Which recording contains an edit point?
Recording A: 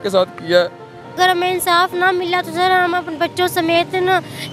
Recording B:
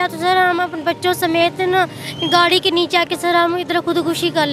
A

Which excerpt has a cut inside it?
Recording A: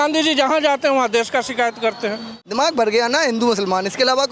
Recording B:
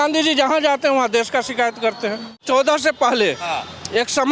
A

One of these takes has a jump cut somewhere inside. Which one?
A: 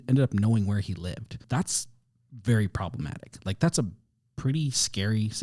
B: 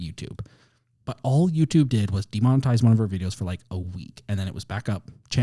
A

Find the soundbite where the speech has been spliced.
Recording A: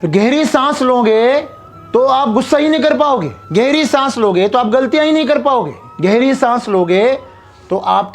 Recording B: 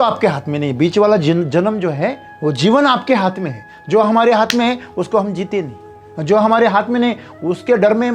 A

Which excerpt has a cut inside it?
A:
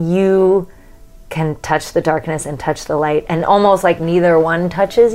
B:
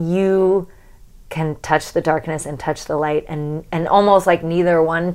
A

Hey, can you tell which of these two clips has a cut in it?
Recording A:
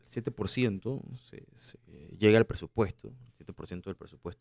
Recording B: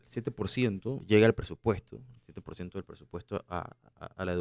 B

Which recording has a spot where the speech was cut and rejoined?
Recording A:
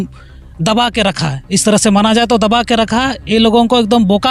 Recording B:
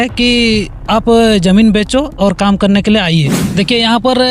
B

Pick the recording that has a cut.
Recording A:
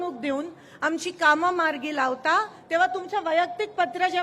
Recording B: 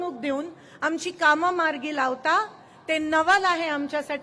A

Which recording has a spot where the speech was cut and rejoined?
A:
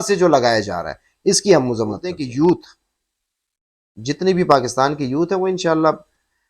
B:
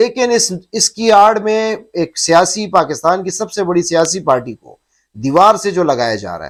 A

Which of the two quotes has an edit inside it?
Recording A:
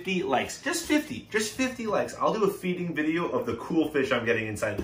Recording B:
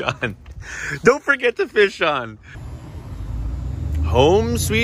B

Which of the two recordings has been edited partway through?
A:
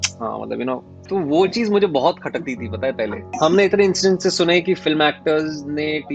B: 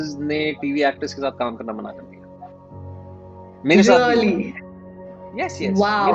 A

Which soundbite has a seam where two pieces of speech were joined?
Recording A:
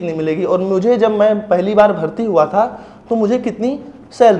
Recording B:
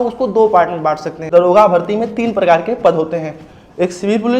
B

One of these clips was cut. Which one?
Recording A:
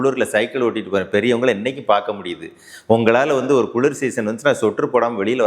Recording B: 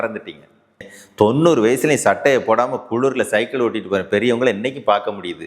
B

